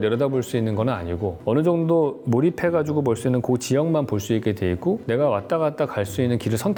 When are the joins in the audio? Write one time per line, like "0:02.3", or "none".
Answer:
none

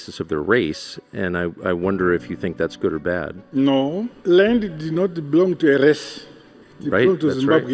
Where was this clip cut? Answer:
0:04.1

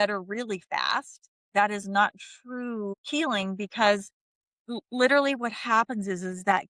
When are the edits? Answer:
0:03.0

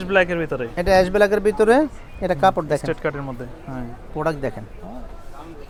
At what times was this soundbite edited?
none

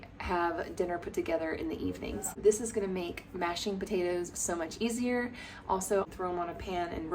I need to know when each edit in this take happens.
0:02.4
0:06.0

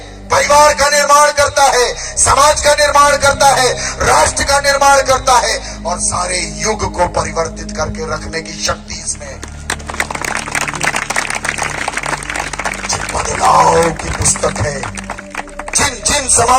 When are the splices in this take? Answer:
none

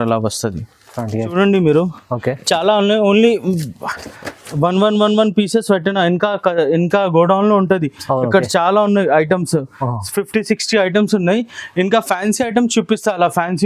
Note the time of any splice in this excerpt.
0:01.3

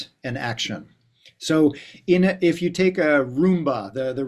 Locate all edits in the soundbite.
none

